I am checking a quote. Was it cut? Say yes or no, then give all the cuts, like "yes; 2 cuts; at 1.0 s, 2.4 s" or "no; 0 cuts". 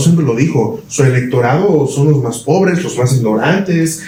no; 0 cuts